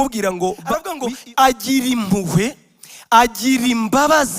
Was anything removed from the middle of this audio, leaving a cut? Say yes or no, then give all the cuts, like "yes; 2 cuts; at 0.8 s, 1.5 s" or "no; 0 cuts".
yes; 1 cut; at 0.9 s